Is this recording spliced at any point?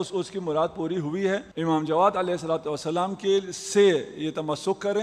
yes; 1 cut; at 1.5 s

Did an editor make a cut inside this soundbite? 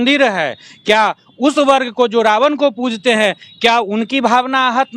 no; 0 cuts

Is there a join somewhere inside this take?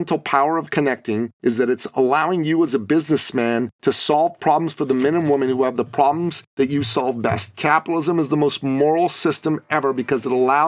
yes; 3 cuts; at 1.3 s, 3.7 s, 6.4 s

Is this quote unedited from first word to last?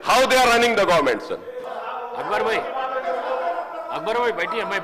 no; 1 cut; at 1.6 s

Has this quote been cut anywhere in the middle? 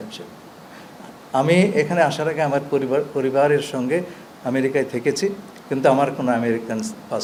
no; 0 cuts

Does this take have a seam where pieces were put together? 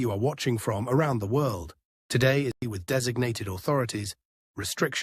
yes; 1 cut; at 2.6 s

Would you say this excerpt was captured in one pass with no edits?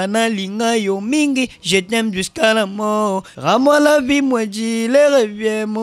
no; 1 cut; at 3.3 s

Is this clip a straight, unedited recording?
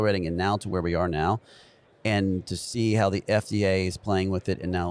yes; 0 cuts

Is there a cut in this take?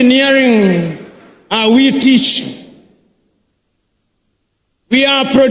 no; 0 cuts

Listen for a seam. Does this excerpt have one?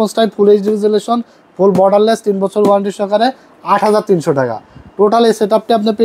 no; 0 cuts

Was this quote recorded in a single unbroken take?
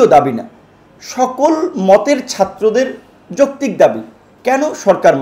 yes; 0 cuts

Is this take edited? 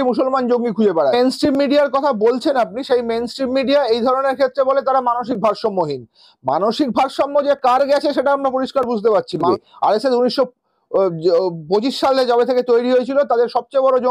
yes; 2 cuts; at 1.1 s, 9.4 s

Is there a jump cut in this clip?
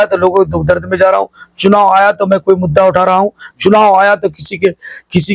no; 0 cuts

